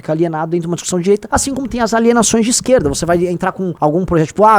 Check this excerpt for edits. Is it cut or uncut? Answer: cut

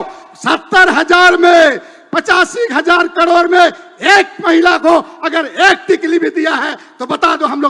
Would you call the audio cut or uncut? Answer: uncut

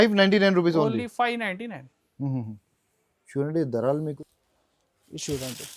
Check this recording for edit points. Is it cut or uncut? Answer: cut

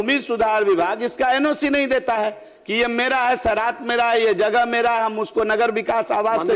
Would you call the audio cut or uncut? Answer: uncut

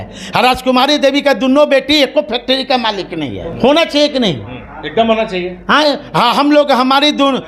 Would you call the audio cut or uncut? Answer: uncut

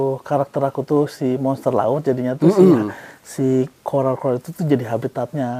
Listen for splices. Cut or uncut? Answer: uncut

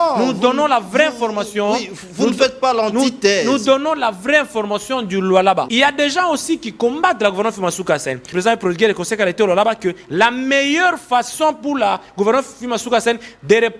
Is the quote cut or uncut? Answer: cut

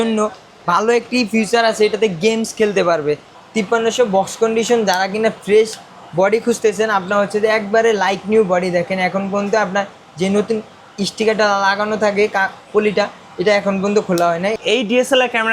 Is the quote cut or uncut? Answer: cut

